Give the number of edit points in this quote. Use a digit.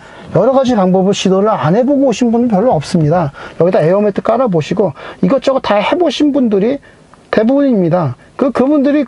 0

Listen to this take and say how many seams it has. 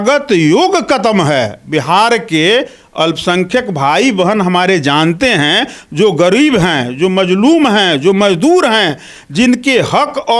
0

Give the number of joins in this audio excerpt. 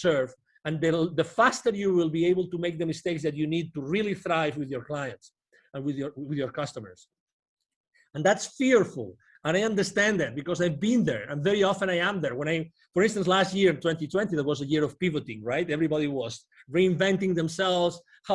0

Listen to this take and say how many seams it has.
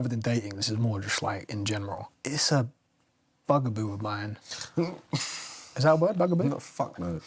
1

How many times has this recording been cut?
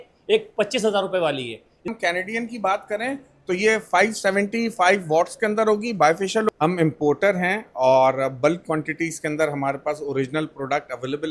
2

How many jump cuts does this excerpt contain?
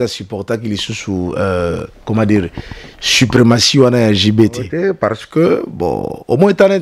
1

